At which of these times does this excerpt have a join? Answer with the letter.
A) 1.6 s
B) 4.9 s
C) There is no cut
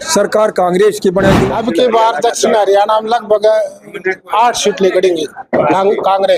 A